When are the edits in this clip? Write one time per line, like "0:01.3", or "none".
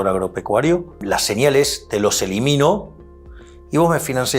0:01.0